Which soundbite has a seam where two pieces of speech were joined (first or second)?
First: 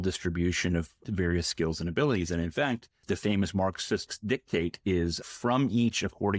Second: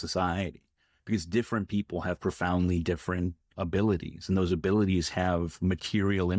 first